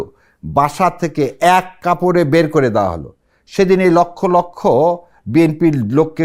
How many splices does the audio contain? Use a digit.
0